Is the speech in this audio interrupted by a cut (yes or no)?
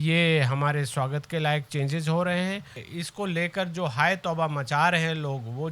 yes